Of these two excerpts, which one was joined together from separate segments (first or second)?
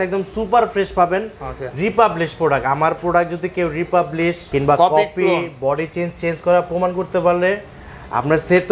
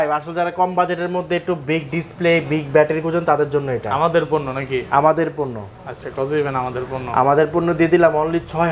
first